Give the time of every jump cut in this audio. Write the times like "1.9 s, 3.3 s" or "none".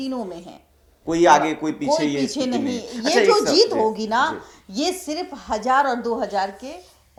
none